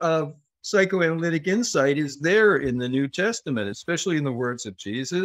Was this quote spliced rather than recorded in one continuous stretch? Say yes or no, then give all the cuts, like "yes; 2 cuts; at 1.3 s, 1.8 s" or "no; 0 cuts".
yes; 1 cut; at 3.8 s